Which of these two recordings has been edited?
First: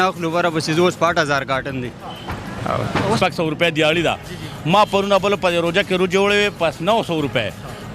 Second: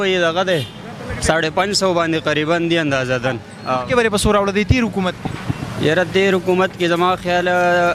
first; 1 cut; at 3.2 s

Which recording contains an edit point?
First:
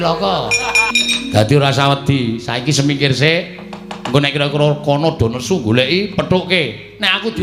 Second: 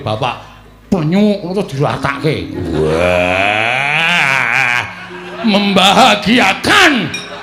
first; 1 cut; at 1.0 s

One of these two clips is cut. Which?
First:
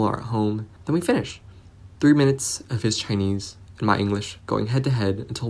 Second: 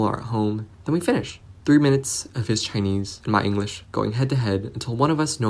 second; 2 cuts; at 1.0 s, 3.1 s

